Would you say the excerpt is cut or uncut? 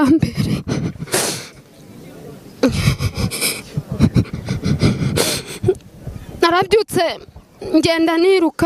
uncut